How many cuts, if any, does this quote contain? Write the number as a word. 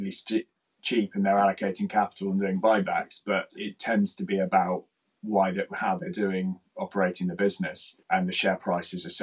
one